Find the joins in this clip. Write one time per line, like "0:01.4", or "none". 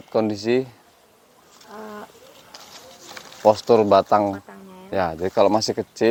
none